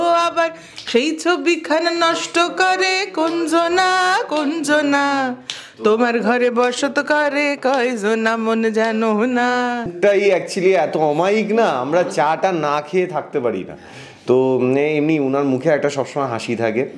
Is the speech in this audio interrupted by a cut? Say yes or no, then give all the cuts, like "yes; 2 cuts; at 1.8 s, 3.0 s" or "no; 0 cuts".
yes; 1 cut; at 9.9 s